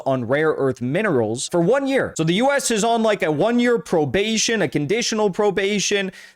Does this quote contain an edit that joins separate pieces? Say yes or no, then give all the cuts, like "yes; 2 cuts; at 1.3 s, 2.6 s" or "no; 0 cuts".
yes; 2 cuts; at 1.5 s, 2.1 s